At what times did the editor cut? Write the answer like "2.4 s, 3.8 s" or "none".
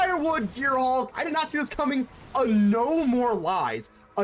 1.2 s